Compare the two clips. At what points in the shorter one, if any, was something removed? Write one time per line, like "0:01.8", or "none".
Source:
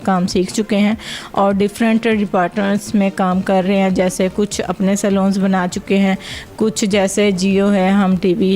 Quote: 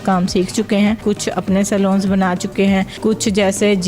0:01.0
0:02.9